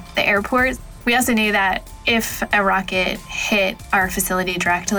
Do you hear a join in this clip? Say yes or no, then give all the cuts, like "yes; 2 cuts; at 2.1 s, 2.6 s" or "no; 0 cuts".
yes; 2 cuts; at 0.9 s, 1.9 s